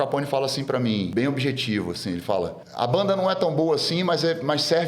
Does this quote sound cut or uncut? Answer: cut